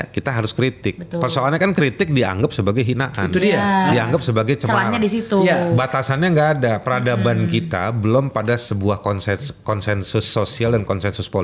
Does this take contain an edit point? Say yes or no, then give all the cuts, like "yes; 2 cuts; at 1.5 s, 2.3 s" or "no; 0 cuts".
no; 0 cuts